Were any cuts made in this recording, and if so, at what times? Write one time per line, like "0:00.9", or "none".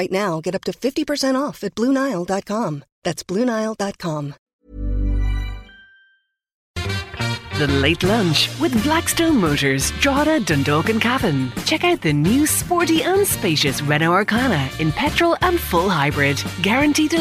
0:04.5
0:06.8